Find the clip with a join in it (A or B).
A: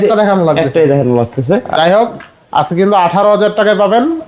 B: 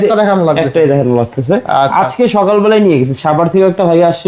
A